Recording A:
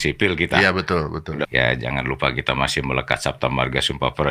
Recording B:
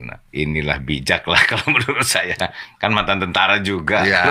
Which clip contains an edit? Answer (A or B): A